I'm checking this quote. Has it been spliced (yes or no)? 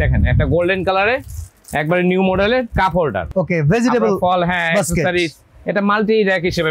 yes